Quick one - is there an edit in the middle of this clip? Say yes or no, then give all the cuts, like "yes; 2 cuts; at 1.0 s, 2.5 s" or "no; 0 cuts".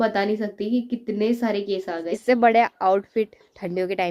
yes; 1 cut; at 2.1 s